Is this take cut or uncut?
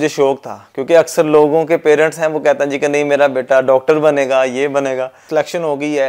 cut